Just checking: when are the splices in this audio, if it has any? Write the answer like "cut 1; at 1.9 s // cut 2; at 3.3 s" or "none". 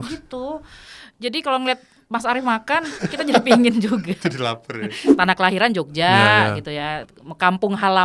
cut 1; at 5.0 s